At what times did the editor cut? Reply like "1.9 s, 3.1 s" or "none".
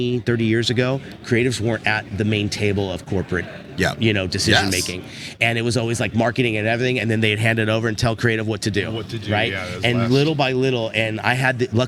none